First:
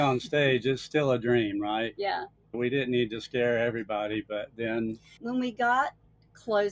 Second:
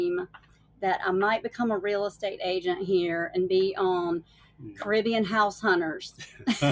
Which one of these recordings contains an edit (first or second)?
first